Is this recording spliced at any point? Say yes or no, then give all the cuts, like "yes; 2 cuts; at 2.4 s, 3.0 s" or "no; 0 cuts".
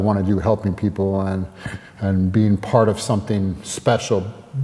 no; 0 cuts